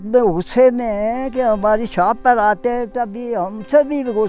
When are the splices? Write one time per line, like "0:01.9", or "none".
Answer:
none